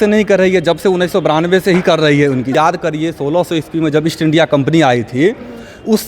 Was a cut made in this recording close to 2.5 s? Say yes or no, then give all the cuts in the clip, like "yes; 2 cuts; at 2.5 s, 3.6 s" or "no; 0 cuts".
yes; 1 cut; at 2.5 s